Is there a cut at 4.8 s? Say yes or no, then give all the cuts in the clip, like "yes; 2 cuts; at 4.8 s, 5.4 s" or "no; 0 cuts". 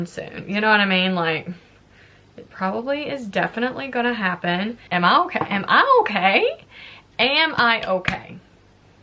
yes; 1 cut; at 4.8 s